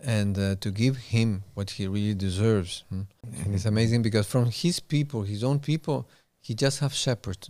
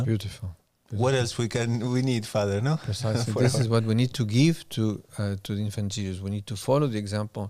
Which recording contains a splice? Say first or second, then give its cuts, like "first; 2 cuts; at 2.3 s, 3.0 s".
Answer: first; 1 cut; at 3.4 s